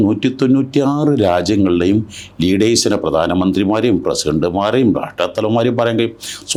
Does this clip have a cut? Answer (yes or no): no